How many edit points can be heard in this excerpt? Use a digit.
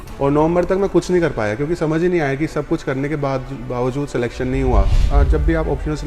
1